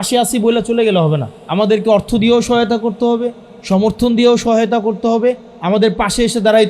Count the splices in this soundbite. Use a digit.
1